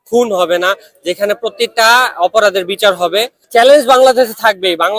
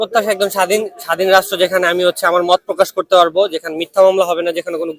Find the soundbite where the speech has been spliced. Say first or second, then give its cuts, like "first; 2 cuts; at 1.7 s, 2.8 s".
first; 1 cut; at 3.4 s